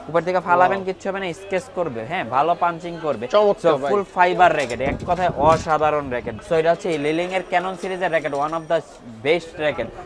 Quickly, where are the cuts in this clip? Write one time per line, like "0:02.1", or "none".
0:06.3